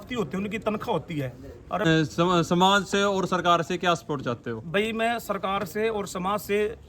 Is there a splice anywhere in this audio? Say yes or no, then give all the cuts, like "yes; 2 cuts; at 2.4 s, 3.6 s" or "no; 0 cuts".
yes; 1 cut; at 1.8 s